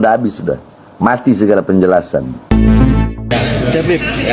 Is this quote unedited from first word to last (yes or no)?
yes